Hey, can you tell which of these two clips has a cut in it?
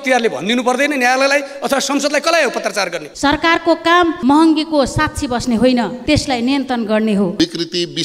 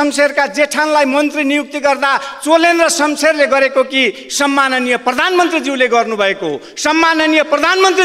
first; 4 cuts; at 3.0 s, 4.2 s, 6.0 s, 7.3 s

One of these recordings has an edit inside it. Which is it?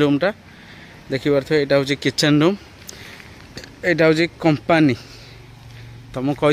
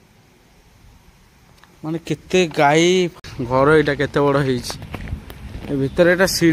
second; 1 cut; at 3.2 s

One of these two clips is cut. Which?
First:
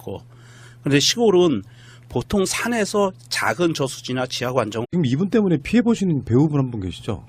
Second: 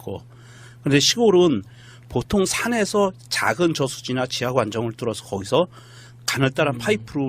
second; 1 cut; at 4.8 s

